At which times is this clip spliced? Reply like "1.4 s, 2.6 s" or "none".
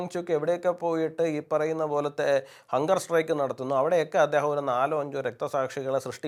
none

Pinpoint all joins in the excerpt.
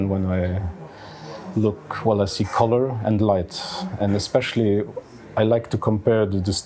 none

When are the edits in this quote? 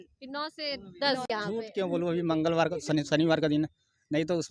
1.3 s

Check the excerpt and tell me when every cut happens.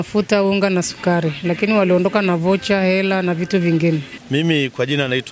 none

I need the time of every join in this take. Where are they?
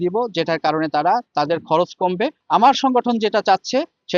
2.4 s

